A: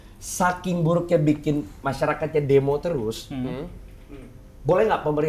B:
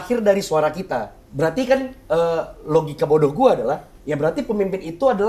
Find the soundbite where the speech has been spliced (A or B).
B